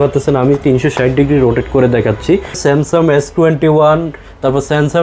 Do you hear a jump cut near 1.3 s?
no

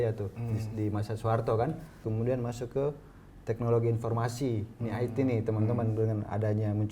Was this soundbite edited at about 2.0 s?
yes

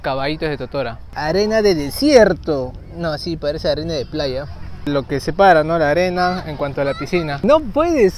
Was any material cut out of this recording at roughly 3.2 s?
no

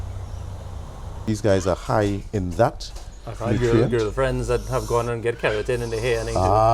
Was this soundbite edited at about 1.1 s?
yes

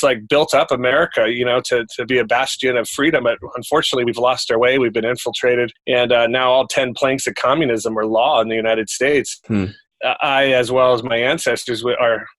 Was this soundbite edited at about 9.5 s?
yes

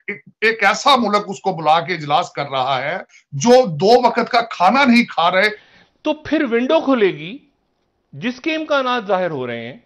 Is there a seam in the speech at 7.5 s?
no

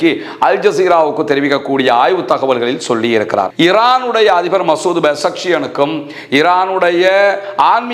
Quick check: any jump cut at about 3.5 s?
yes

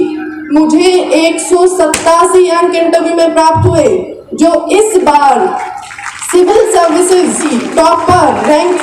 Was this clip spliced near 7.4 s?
yes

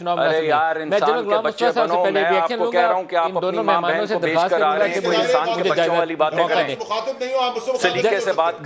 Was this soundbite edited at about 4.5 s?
no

